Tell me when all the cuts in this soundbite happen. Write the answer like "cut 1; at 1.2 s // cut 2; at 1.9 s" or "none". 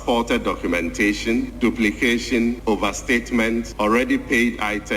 cut 1; at 1.5 s // cut 2; at 2.6 s // cut 3; at 3.7 s